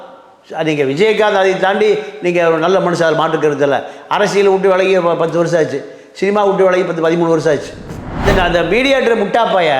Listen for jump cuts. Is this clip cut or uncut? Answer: cut